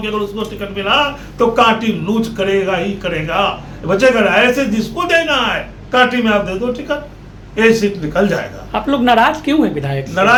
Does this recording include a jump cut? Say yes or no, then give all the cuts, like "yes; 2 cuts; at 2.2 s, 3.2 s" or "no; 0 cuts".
no; 0 cuts